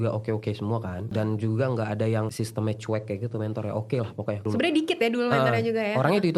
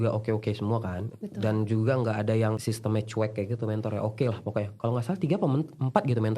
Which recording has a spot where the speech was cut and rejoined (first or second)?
first